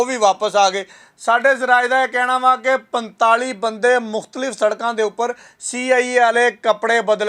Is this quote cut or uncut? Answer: uncut